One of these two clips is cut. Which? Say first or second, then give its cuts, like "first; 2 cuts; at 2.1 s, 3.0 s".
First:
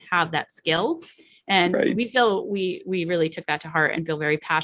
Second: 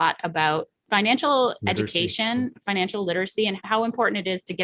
second; 1 cut; at 3.6 s